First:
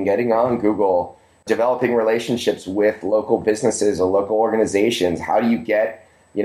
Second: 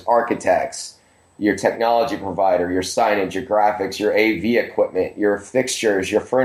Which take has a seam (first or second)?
first